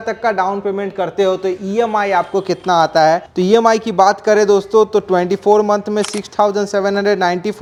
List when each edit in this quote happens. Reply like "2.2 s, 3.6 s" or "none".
none